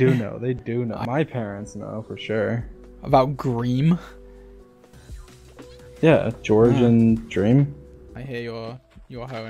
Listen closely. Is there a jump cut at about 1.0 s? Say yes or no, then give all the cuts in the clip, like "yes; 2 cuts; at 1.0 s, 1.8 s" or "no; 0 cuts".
yes; 2 cuts; at 1.0 s, 8.1 s